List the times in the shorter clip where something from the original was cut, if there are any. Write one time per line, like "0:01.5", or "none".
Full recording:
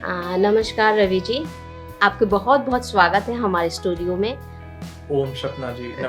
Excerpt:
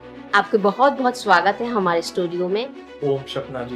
0:02.8